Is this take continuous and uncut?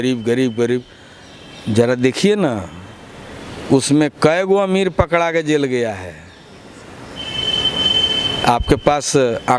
yes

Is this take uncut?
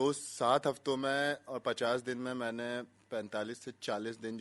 yes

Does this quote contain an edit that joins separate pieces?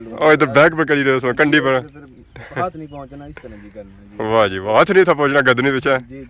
no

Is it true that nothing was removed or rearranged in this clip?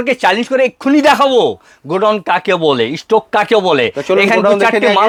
yes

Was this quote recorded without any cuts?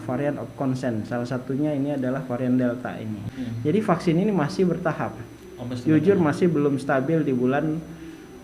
no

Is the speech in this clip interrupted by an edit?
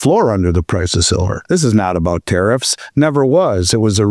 yes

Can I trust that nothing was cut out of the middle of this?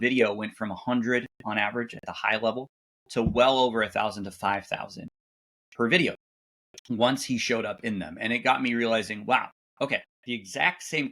no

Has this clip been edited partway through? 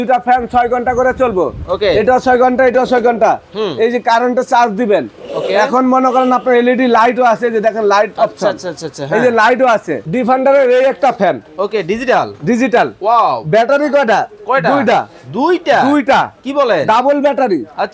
yes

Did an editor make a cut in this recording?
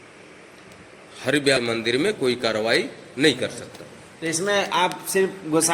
yes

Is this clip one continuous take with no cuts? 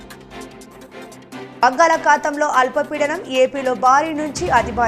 no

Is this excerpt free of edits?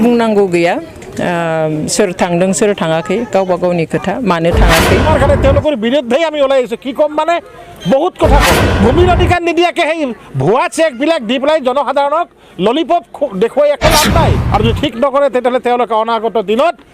no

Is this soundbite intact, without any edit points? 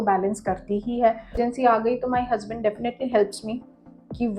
no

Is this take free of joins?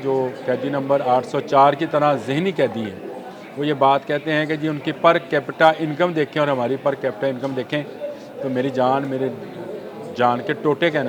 yes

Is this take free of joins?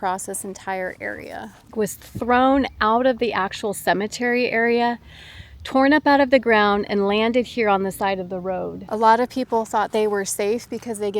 no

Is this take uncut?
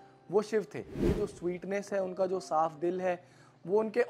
no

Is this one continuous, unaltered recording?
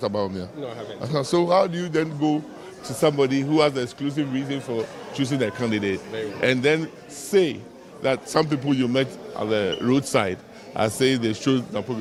yes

